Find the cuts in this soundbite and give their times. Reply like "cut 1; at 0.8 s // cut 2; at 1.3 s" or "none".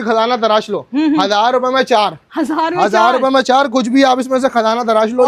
none